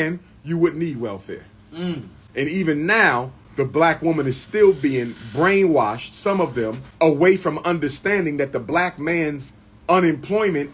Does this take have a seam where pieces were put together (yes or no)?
yes